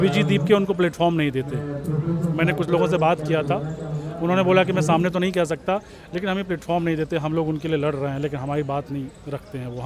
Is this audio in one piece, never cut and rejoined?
yes; 0 cuts

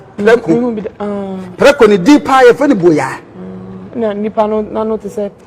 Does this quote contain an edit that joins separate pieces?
no; 0 cuts

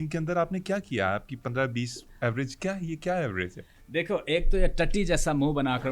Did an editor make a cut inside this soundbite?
no; 0 cuts

